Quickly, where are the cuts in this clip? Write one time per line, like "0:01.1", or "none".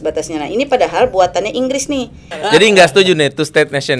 0:02.5